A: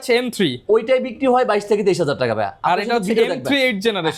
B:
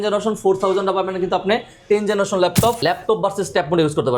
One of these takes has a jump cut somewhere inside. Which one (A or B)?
B